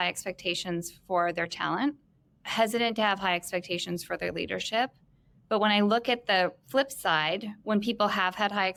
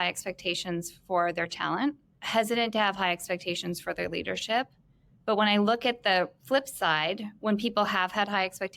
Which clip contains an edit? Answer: second; 1 cut; at 2.1 s

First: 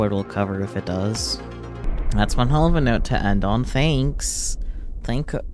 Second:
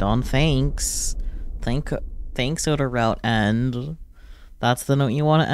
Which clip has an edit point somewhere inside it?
first; 1 cut; at 1.9 s

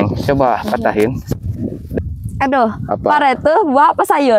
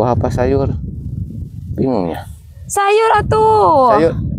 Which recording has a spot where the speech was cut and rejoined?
first; 1 cut; at 2.0 s

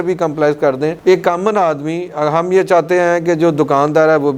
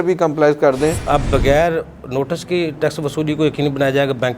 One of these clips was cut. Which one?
second; 1 cut; at 1.0 s

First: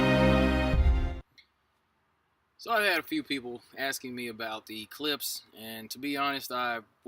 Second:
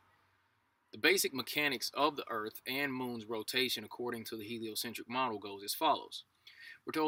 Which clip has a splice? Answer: first; 1 cut; at 5.1 s

